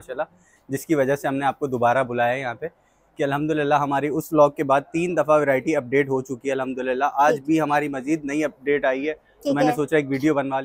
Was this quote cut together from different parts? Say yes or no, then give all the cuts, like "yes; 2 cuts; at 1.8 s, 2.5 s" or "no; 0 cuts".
no; 0 cuts